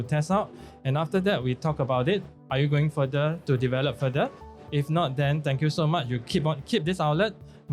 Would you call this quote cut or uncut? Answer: uncut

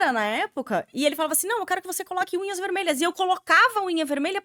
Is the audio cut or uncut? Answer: uncut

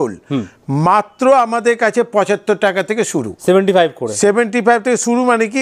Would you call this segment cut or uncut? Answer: uncut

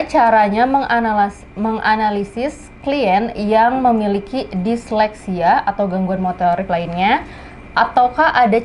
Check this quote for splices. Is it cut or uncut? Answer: uncut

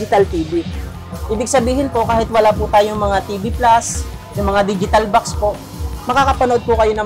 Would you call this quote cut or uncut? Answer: uncut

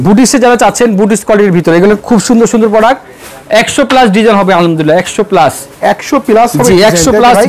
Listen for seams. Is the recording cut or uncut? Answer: uncut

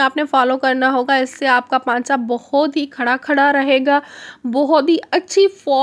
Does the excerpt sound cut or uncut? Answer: uncut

